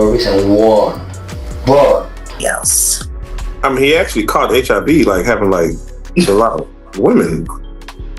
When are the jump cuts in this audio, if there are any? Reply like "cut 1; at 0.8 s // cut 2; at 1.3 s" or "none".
cut 1; at 2.4 s